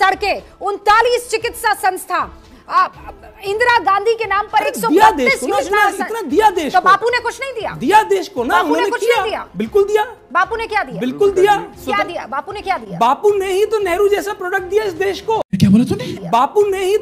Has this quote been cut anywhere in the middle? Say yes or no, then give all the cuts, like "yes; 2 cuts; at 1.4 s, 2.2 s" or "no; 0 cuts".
no; 0 cuts